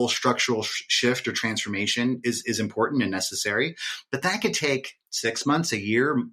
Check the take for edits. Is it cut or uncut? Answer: uncut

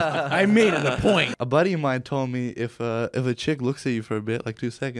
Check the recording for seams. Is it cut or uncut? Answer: cut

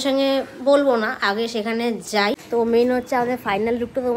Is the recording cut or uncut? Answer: cut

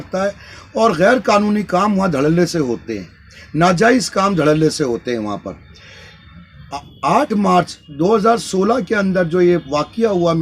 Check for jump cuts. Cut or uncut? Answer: uncut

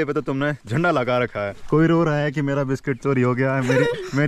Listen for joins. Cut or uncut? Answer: cut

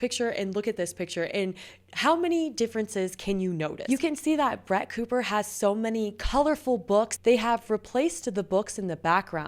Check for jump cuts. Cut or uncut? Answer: cut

